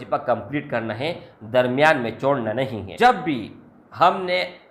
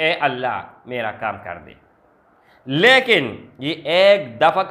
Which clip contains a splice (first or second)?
first